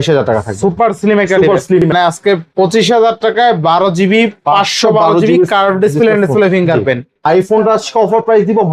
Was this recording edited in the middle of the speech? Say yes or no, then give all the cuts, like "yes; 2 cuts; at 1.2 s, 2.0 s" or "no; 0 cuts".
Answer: yes; 2 cuts; at 1.9 s, 7.1 s